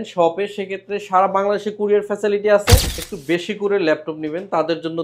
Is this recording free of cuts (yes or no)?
no